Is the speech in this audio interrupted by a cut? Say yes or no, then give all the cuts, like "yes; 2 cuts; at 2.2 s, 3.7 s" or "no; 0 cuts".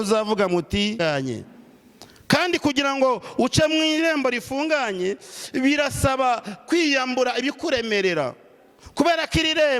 yes; 1 cut; at 1.0 s